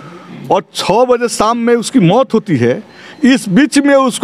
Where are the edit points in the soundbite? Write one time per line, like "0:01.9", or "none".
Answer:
none